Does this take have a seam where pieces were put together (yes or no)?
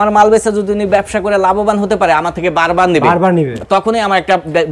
no